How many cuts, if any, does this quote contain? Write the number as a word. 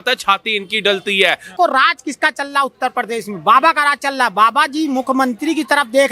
one